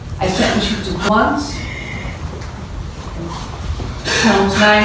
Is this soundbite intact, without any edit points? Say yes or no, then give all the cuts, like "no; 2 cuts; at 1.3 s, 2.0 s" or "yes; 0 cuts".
no; 1 cut; at 1.1 s